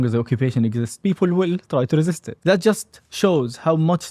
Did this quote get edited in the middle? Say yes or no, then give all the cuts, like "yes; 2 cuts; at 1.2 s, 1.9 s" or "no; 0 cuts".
yes; 2 cuts; at 0.9 s, 2.3 s